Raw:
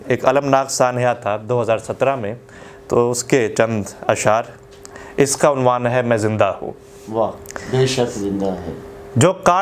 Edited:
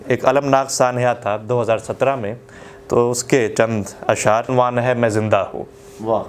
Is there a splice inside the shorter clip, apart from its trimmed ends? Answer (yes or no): yes